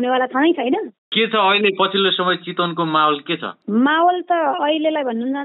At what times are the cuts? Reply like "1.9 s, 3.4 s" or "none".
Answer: 1.0 s